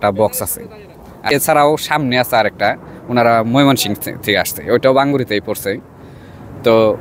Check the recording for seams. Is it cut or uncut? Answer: cut